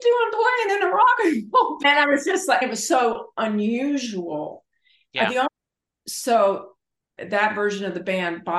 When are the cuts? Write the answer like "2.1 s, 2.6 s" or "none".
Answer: 5.5 s